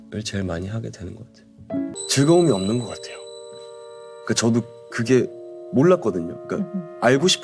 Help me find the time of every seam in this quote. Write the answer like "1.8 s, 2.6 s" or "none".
2.0 s